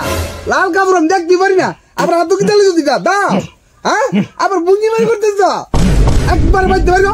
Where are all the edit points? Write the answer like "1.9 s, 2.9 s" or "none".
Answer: none